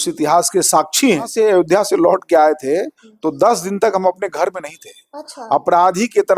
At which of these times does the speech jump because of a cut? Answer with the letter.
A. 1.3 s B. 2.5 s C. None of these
A